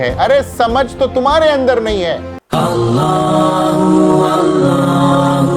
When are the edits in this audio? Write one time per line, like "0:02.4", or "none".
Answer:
0:02.3